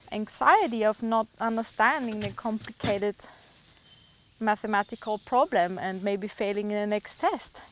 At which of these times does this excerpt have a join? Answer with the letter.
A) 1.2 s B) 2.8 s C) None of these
C